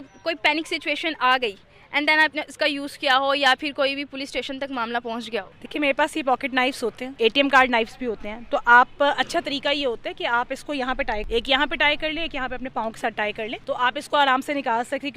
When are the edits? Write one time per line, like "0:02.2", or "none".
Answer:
0:05.6
0:07.0
0:11.2
0:13.6